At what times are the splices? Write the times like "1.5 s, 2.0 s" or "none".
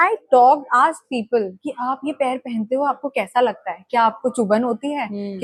none